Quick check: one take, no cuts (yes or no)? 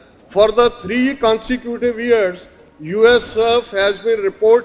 yes